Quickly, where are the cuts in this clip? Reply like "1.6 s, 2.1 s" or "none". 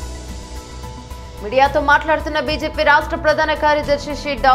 1.0 s